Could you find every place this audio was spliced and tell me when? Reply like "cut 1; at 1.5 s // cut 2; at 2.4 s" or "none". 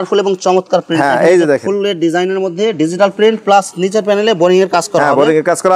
none